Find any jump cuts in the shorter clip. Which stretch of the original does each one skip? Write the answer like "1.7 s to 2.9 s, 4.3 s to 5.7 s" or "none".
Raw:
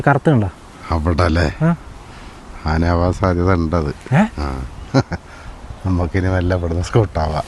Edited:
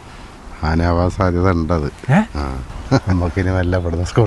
5.1 s to 5.8 s